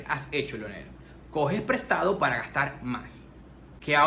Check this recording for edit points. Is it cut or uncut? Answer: uncut